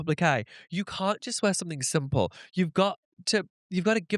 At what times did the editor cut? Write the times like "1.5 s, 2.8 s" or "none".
none